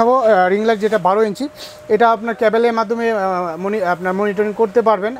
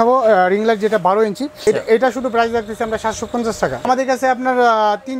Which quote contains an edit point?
second; 2 cuts; at 1.6 s, 3.9 s

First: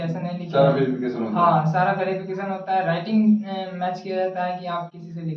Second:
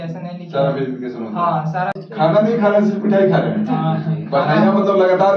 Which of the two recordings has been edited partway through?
second; 1 cut; at 2.0 s

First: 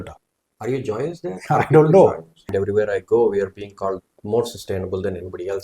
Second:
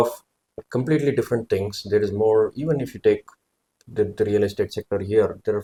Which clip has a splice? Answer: first; 1 cut; at 2.5 s

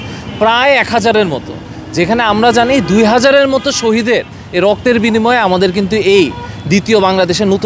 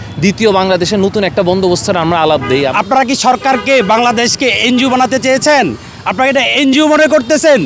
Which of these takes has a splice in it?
second; 1 cut; at 2.7 s

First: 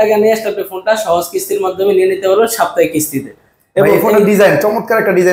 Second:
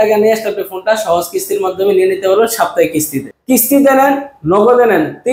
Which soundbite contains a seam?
second; 1 cut; at 3.3 s

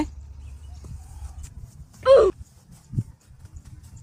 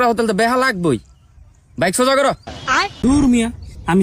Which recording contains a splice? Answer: second; 1 cut; at 3.1 s

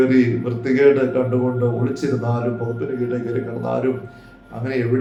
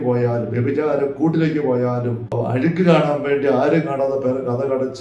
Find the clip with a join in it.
second; 1 cut; at 2.3 s

